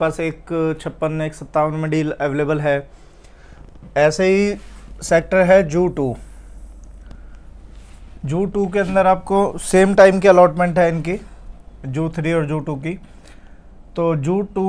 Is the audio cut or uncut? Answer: uncut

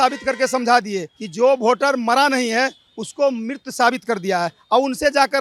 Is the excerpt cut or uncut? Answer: uncut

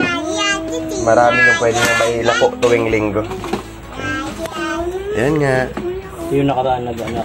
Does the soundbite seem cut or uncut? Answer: uncut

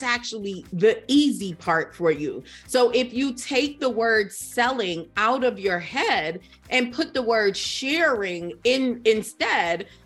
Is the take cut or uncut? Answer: uncut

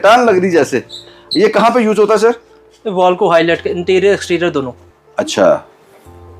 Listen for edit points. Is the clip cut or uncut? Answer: uncut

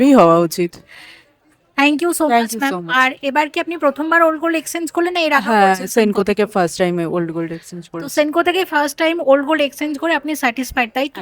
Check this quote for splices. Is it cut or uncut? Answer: uncut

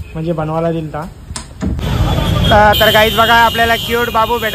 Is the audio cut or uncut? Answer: cut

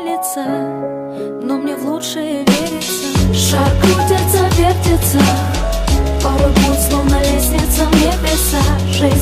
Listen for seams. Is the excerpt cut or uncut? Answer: uncut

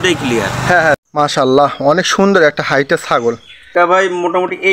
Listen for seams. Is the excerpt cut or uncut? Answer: cut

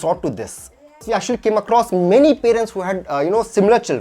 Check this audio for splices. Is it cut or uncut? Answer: cut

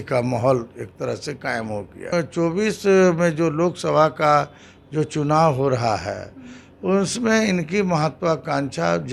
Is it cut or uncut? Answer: cut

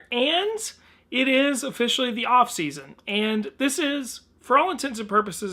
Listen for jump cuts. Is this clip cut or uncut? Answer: uncut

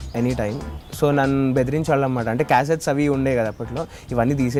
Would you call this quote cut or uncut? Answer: uncut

